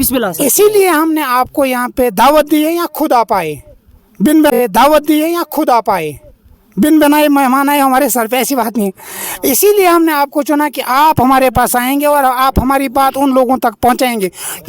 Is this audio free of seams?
yes; 0 cuts

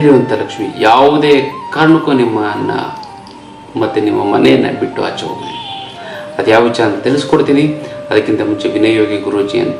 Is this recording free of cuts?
yes; 0 cuts

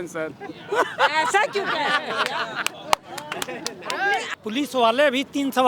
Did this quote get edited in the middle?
yes; 1 cut; at 4.3 s

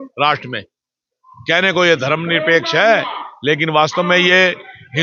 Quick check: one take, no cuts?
yes; 0 cuts

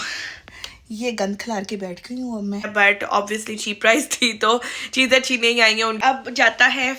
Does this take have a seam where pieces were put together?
yes; 2 cuts; at 2.7 s, 6.0 s

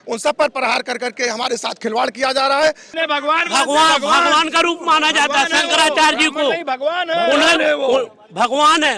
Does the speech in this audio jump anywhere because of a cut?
yes; 1 cut; at 2.9 s

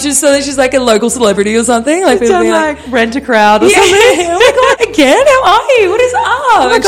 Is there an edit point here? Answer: yes; 1 cut; at 4.8 s

